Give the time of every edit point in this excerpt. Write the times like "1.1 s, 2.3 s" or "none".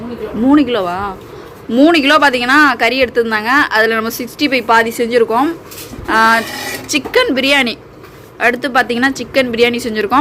none

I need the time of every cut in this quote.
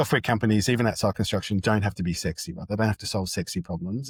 none

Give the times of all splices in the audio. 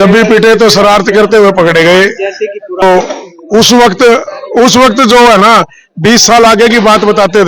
2.8 s

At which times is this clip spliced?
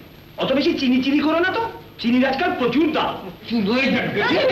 3.4 s

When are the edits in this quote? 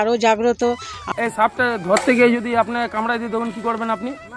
1.0 s

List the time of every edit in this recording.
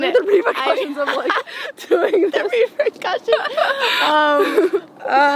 none

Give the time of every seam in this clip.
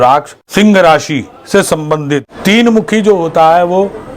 2.3 s

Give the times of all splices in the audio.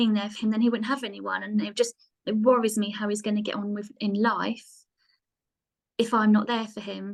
none

